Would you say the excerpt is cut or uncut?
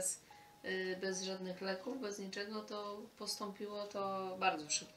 uncut